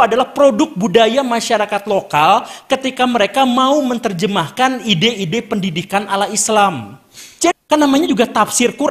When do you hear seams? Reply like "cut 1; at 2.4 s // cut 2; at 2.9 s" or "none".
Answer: cut 1; at 7.5 s